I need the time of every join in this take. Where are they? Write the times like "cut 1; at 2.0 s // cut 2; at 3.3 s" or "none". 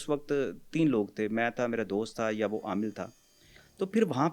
none